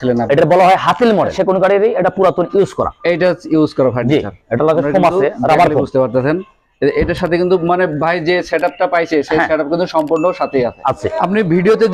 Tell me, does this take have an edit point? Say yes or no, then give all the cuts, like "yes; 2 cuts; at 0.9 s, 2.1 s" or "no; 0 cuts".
yes; 2 cuts; at 1.4 s, 11.1 s